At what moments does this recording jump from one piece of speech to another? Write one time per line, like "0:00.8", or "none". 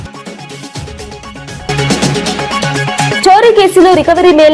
0:01.4